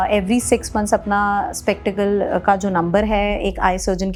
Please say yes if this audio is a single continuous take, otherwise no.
yes